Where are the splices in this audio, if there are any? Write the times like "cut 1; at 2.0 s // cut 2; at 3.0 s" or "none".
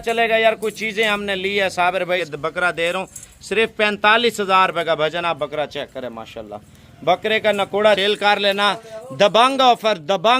cut 1; at 2.2 s // cut 2; at 8.0 s